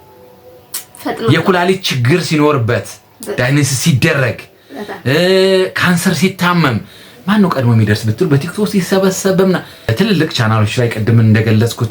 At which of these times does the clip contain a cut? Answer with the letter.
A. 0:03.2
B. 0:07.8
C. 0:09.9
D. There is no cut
C